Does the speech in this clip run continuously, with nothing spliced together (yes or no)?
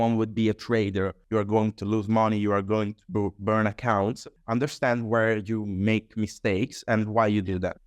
no